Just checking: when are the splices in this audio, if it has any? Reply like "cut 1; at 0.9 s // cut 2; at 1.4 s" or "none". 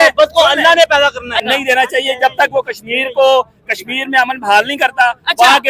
cut 1; at 1.4 s